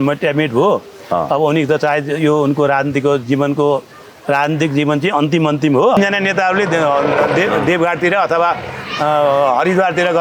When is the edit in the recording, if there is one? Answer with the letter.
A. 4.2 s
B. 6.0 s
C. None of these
B